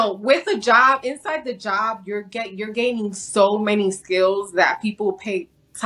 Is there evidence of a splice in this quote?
no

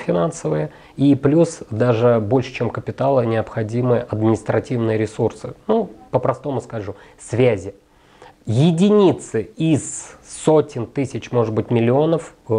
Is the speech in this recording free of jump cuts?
yes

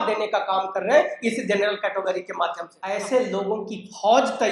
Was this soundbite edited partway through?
yes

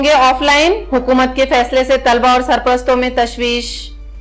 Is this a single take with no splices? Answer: yes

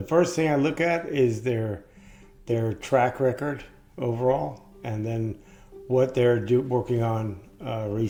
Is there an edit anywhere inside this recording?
no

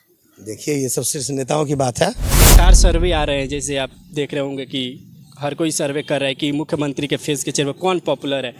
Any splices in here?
yes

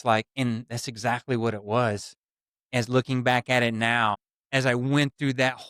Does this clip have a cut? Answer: no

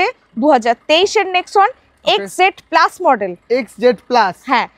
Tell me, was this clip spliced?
no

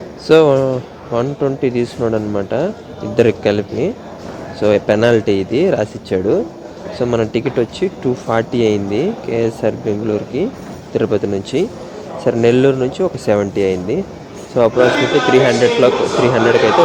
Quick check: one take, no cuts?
yes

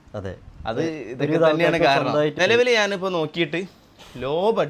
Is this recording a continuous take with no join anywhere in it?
no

